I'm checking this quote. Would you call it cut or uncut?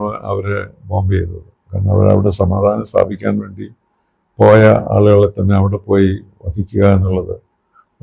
uncut